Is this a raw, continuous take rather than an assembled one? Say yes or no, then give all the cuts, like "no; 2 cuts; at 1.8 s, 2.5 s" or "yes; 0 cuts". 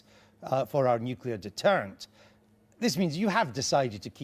no; 1 cut; at 2.3 s